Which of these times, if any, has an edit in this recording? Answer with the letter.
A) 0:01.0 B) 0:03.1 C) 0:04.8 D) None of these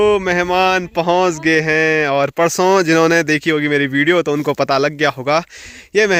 D